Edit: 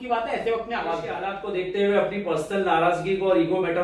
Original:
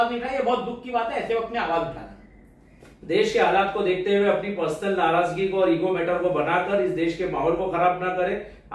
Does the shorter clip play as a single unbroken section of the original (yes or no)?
no